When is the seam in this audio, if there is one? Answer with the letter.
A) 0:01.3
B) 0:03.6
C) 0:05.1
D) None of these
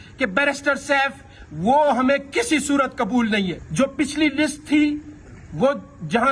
B